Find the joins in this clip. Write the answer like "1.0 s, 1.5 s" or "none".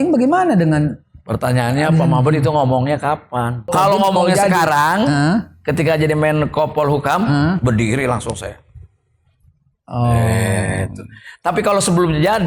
3.7 s